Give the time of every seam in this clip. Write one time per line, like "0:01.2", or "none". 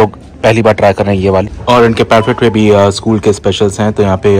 0:01.5